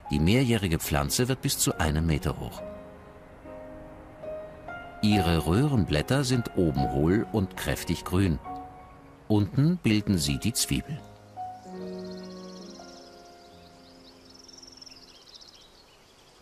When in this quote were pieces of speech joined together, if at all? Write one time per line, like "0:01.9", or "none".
0:03.9